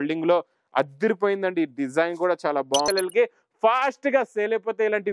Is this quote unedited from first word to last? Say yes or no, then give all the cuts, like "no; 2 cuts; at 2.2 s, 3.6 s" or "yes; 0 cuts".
no; 1 cut; at 2.9 s